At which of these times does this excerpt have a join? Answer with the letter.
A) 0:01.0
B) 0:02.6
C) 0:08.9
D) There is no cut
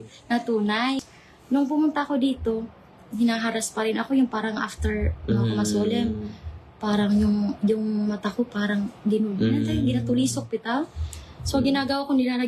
A